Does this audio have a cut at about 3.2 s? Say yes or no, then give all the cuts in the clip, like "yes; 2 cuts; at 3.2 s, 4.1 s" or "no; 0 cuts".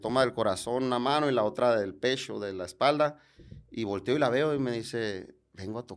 no; 0 cuts